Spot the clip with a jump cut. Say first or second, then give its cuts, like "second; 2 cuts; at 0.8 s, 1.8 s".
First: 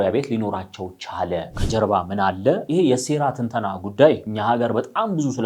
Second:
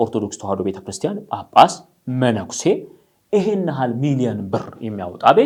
first; 3 cuts; at 1.5 s, 2.6 s, 4.3 s